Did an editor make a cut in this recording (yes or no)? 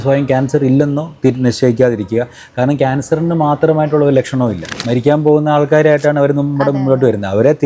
yes